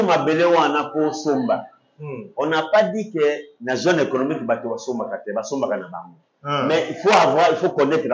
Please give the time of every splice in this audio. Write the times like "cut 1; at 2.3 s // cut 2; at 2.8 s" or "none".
none